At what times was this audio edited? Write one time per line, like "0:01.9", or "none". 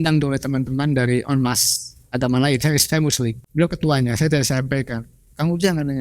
0:03.4